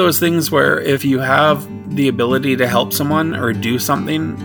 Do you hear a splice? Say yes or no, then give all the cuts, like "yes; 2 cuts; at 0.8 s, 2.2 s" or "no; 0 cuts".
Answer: yes; 2 cuts; at 1.0 s, 1.8 s